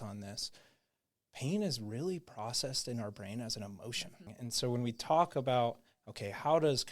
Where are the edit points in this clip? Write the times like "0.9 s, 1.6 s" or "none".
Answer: 4.3 s